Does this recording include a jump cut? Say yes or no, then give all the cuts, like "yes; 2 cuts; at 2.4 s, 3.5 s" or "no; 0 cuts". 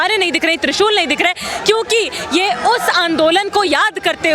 no; 0 cuts